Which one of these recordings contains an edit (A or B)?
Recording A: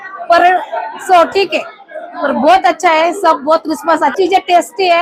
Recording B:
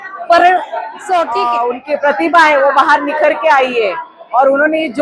B